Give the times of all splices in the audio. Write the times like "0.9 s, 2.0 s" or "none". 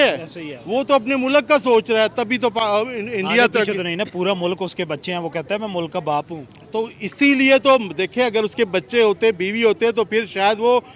none